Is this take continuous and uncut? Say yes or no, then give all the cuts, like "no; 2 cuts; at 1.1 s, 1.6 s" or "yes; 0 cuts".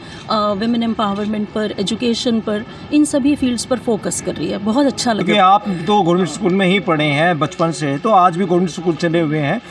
no; 1 cut; at 5.2 s